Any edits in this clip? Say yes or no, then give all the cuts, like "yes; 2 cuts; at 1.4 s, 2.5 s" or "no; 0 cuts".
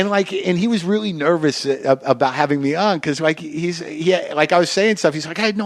no; 0 cuts